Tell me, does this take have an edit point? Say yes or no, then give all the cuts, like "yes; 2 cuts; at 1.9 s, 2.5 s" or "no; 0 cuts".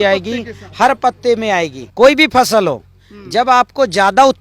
yes; 1 cut; at 1.8 s